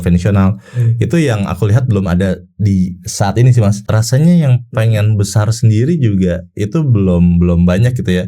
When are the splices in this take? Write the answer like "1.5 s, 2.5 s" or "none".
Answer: 3.8 s